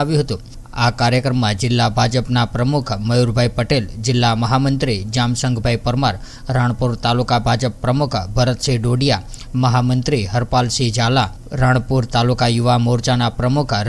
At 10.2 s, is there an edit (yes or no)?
no